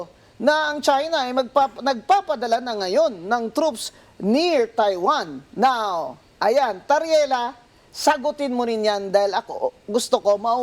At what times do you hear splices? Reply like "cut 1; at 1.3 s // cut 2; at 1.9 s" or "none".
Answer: none